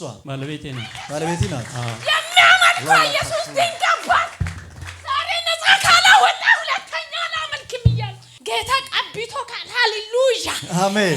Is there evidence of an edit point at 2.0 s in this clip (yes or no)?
yes